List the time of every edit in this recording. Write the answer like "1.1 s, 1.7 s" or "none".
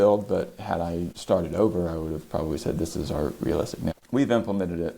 1.1 s, 3.9 s